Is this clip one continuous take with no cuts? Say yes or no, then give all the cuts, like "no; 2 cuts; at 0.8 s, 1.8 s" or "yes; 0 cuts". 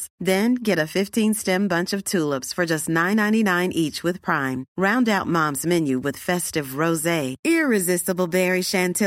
yes; 0 cuts